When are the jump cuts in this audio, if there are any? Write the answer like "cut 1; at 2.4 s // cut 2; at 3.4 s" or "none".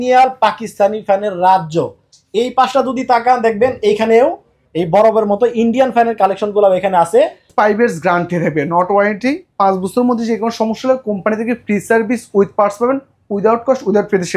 cut 1; at 7.5 s